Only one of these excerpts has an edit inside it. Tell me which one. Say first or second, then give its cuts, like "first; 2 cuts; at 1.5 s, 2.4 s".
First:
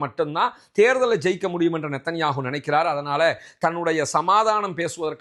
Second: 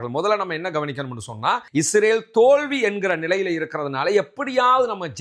second; 1 cut; at 1.6 s